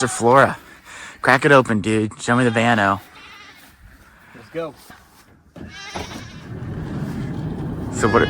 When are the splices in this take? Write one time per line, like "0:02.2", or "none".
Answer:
0:04.8